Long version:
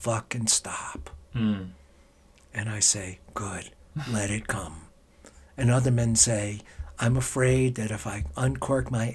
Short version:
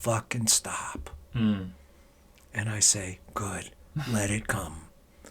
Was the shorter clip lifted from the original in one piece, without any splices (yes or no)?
yes